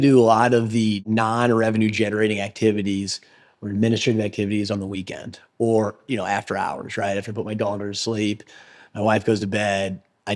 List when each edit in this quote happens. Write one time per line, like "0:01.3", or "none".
0:01.0
0:06.0